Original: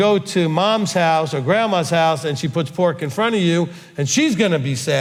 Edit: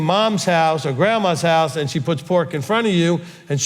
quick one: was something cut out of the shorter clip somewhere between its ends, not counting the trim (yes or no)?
no